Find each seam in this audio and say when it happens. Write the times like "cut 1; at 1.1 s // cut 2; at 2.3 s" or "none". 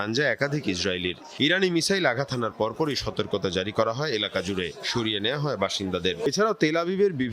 cut 1; at 6.3 s